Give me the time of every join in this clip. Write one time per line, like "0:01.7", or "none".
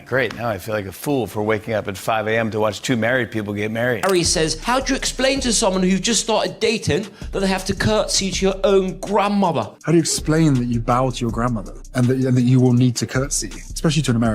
0:03.9